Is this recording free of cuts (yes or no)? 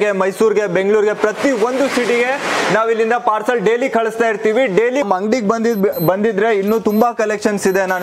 no